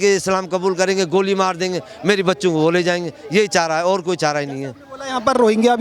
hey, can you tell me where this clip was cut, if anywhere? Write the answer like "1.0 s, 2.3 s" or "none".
none